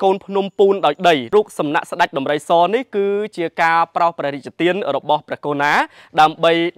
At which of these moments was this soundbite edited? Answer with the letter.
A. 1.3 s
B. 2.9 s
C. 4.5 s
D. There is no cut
A